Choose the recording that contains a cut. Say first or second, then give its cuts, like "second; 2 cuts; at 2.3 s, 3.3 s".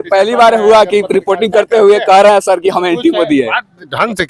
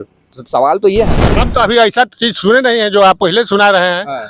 second; 1 cut; at 1.4 s